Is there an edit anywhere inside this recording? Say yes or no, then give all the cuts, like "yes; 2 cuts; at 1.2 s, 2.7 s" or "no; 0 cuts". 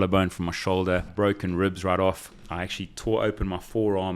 yes; 1 cut; at 1.1 s